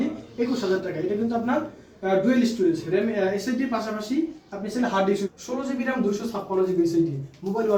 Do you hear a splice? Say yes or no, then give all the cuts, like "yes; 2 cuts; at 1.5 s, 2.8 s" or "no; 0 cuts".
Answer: yes; 1 cut; at 5.3 s